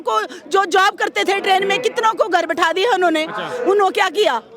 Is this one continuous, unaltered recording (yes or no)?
yes